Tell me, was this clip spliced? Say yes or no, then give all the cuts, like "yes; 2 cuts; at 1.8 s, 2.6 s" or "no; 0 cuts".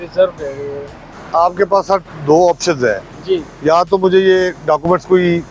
yes; 1 cut; at 1.1 s